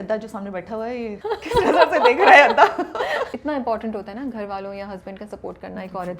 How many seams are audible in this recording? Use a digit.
2